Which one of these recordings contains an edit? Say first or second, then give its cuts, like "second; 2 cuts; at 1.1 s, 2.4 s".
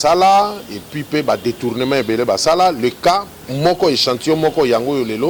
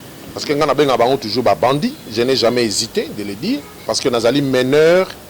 second; 1 cut; at 3.8 s